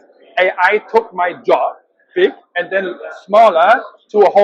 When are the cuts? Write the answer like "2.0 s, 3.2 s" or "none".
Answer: none